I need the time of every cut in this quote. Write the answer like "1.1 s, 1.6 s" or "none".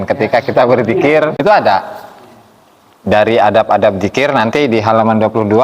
1.4 s